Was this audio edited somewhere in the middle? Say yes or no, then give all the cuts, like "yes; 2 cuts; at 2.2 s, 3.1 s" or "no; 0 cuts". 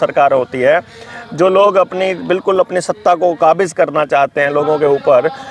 no; 0 cuts